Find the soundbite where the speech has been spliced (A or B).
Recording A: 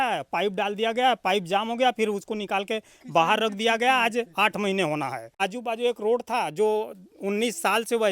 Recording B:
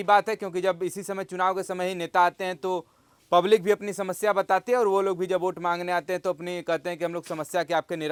A